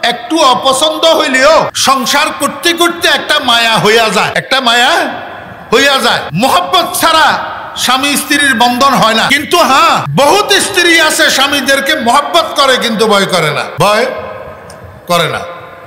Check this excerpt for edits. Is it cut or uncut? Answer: cut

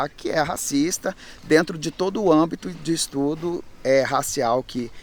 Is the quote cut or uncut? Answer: uncut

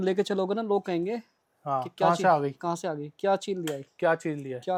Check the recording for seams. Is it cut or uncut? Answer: uncut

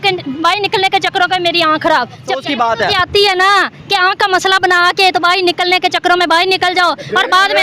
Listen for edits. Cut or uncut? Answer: cut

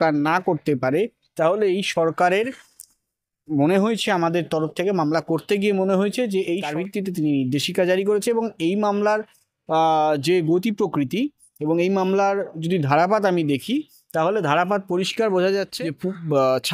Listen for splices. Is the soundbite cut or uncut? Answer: cut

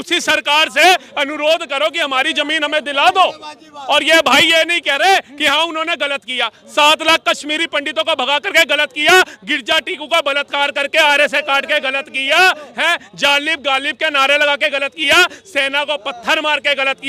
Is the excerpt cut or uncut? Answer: uncut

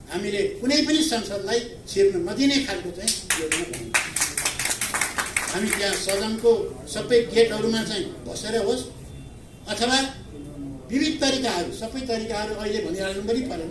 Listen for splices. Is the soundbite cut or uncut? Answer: uncut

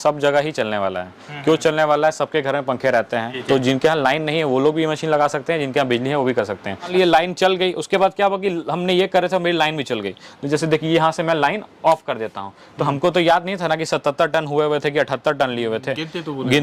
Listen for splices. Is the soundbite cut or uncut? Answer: cut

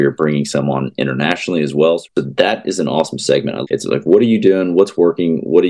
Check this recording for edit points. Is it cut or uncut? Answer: cut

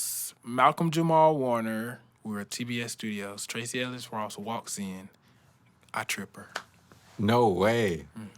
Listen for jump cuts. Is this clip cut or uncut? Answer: cut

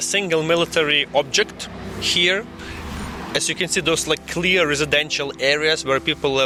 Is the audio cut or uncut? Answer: uncut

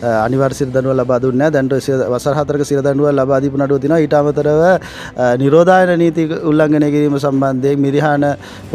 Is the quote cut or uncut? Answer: uncut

